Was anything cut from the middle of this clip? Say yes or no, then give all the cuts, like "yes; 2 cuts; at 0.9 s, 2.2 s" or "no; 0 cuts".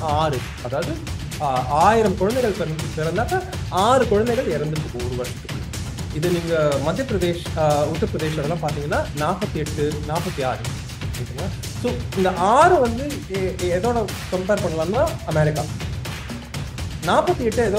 no; 0 cuts